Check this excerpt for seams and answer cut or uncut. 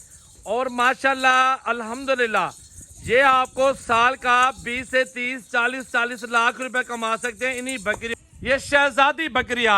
cut